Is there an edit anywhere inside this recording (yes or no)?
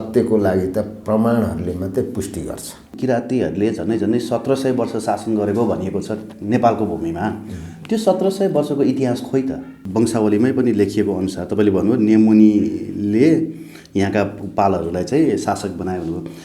yes